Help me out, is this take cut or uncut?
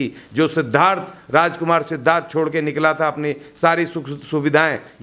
uncut